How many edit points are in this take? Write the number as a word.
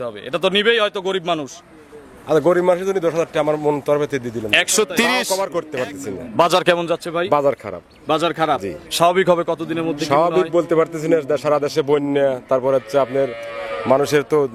one